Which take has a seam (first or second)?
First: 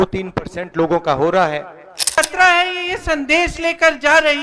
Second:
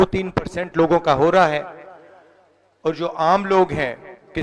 first